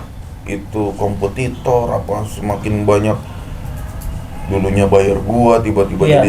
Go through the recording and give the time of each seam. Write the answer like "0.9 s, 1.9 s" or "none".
none